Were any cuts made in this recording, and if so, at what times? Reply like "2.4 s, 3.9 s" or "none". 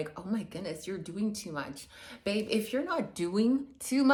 none